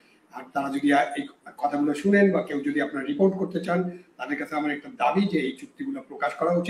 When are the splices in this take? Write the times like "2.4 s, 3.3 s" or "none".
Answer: none